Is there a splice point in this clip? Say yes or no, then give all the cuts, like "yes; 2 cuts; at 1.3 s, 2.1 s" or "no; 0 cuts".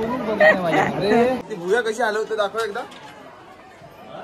yes; 1 cut; at 1.3 s